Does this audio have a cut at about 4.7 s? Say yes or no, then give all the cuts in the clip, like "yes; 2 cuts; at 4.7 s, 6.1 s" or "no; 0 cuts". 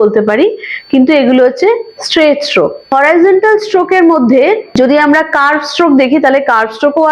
no; 1 cut; at 2.9 s